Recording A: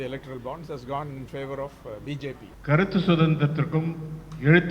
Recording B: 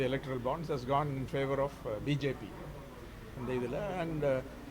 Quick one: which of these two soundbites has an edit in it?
A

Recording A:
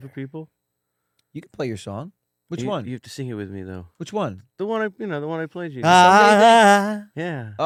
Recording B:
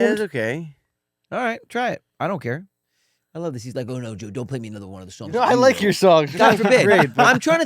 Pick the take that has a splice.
B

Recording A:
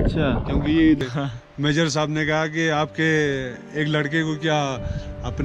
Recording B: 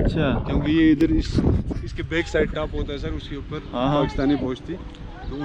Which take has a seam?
A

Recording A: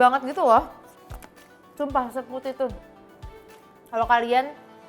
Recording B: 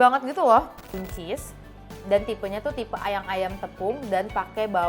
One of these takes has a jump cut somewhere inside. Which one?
B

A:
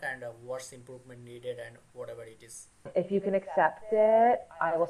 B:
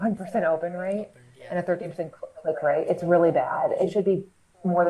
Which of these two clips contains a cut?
A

